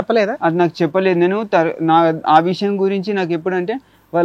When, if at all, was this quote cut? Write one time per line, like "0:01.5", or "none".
none